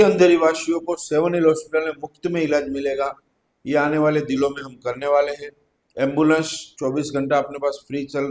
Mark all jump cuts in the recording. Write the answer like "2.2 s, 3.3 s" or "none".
none